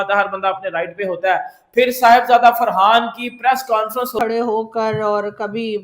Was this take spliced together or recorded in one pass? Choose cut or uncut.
cut